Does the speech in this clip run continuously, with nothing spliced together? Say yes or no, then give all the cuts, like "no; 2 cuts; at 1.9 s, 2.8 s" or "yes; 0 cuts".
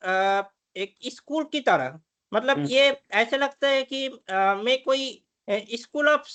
yes; 0 cuts